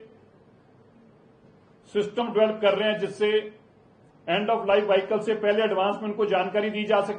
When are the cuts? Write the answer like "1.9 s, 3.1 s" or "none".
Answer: none